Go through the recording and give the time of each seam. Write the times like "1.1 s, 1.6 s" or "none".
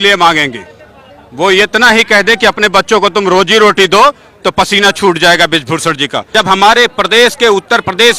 6.3 s